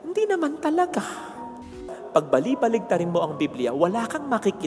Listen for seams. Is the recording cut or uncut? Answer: cut